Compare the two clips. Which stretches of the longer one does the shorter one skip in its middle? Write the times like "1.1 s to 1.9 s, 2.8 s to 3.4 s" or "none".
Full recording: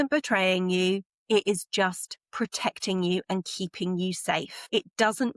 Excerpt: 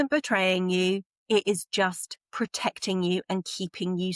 none